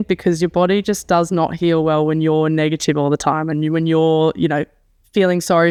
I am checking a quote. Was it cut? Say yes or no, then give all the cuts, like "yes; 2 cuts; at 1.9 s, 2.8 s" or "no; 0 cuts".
no; 0 cuts